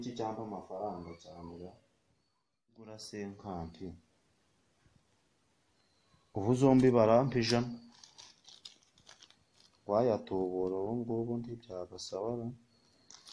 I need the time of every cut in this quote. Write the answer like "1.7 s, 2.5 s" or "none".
3.0 s